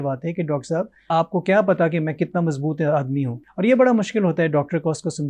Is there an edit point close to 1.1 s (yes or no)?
yes